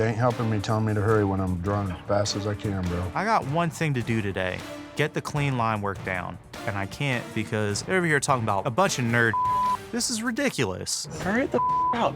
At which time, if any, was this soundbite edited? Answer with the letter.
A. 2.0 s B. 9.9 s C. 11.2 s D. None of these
C